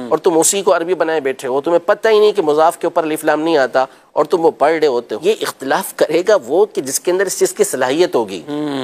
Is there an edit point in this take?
yes; 1 cut; at 5.1 s

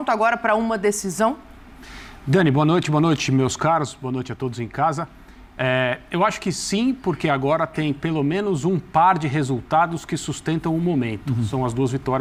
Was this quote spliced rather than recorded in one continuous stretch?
no; 0 cuts

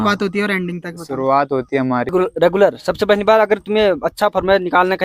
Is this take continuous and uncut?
no; 1 cut; at 2.1 s

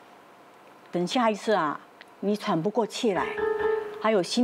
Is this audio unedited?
yes; 0 cuts

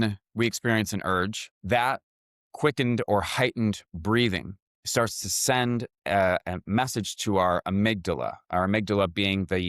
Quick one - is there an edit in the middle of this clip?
yes; 1 cut; at 1.5 s

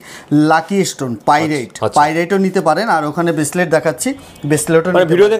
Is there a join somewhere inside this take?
no; 0 cuts

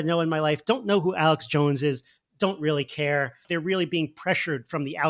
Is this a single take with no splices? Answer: no; 1 cut; at 3.4 s

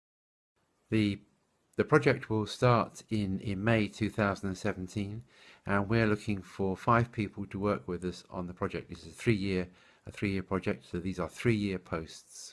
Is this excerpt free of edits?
yes; 0 cuts

